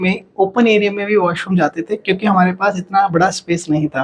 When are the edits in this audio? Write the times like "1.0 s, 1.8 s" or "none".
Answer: none